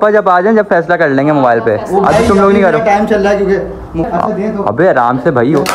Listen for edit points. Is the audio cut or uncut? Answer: cut